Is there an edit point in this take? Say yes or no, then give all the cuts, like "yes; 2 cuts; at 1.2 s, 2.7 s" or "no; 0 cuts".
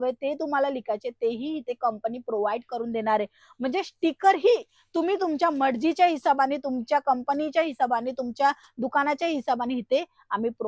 no; 0 cuts